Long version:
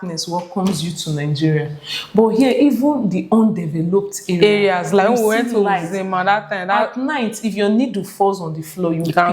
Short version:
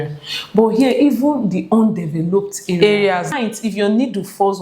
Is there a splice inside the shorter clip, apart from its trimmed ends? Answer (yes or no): yes